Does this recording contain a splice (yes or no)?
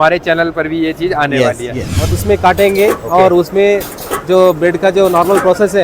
yes